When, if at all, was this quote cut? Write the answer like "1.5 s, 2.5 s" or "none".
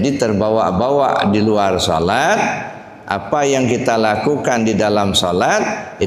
none